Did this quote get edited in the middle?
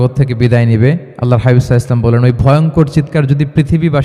yes; 1 cut; at 1.1 s

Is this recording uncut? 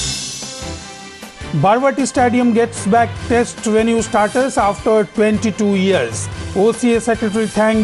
no; 1 cut; at 1.1 s

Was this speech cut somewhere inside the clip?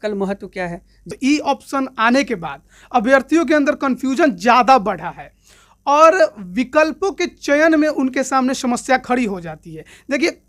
yes; 1 cut; at 1.0 s

